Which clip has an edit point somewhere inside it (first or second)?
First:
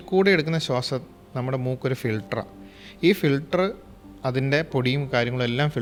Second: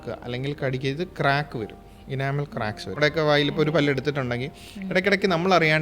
second